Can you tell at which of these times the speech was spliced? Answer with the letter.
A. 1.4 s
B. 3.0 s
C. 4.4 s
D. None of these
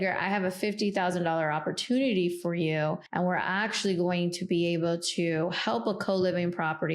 B